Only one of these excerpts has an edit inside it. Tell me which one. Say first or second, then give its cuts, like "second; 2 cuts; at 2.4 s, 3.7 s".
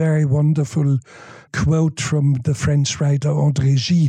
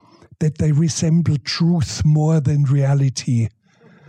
first; 1 cut; at 1.5 s